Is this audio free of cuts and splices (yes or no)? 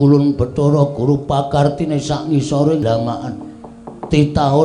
no